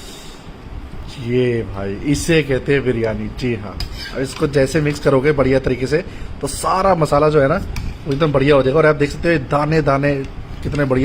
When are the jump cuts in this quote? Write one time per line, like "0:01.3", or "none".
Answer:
0:01.0